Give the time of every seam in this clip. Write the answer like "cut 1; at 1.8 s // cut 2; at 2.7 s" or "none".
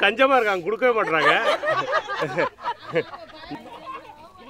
cut 1; at 3.5 s